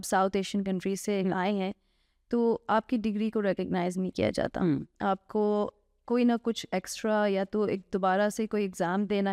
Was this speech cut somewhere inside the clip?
no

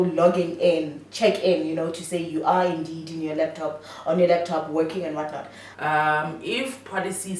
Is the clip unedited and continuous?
no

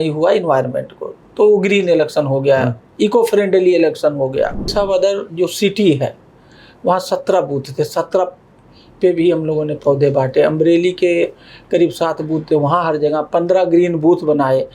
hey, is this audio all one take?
no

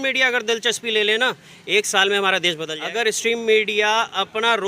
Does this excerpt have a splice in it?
yes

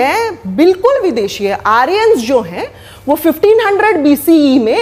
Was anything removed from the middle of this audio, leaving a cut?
no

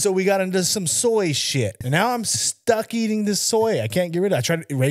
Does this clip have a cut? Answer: yes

